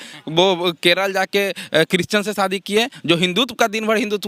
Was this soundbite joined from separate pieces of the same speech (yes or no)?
no